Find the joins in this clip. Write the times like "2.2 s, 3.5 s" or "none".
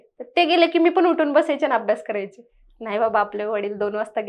none